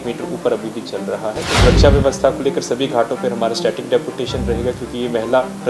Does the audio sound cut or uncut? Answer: cut